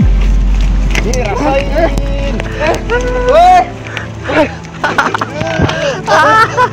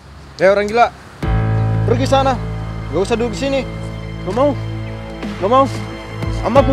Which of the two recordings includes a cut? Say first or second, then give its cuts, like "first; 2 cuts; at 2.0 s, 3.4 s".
first; 1 cut; at 4.7 s